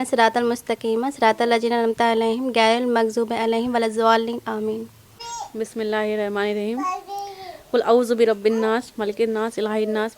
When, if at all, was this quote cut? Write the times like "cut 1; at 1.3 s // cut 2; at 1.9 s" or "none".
cut 1; at 5.2 s